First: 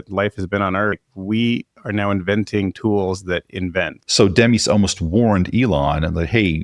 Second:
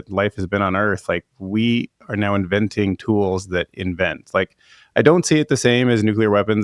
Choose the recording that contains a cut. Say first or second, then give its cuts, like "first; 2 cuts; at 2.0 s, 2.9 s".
first; 2 cuts; at 1.0 s, 4.0 s